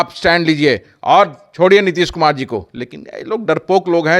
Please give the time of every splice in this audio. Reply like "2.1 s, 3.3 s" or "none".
none